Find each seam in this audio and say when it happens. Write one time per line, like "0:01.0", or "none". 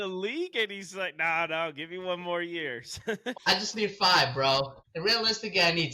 0:03.3
0:04.8